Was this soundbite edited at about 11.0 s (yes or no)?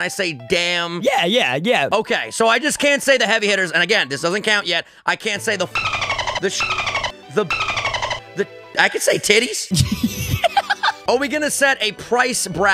yes